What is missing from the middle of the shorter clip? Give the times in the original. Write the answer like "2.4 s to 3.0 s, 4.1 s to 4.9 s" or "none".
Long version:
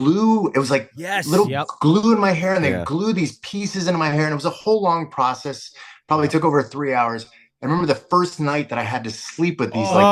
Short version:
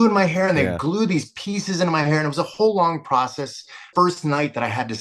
5.9 s to 8.0 s